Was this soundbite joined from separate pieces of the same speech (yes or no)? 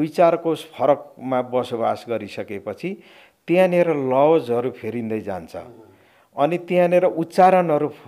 no